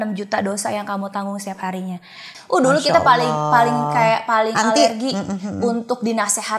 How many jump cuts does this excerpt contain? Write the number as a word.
one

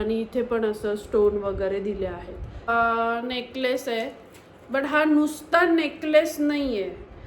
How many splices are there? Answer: one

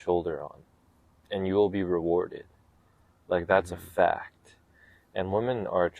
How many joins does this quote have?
zero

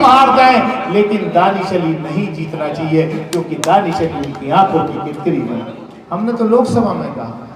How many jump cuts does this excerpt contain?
one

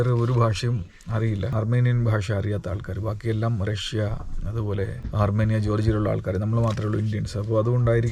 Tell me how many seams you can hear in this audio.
one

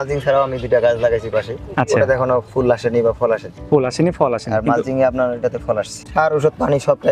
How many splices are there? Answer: one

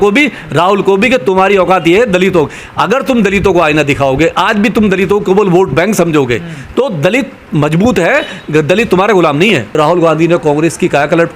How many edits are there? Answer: one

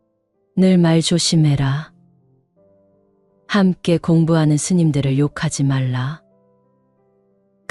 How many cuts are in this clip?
two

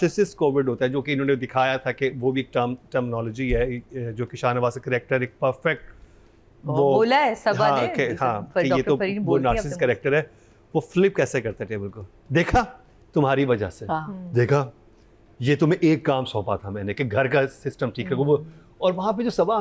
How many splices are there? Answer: zero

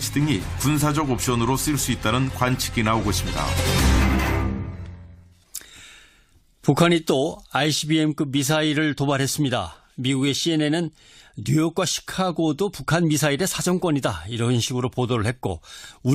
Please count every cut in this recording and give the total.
zero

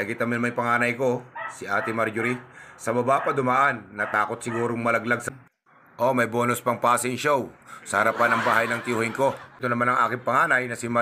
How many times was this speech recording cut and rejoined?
two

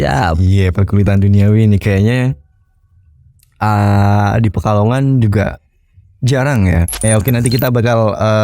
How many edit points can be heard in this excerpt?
one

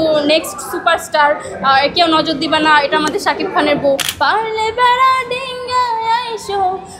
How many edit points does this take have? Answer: one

